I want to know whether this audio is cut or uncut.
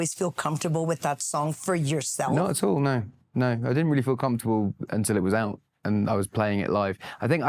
uncut